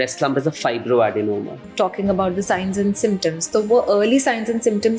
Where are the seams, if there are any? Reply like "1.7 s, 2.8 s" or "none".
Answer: 1.6 s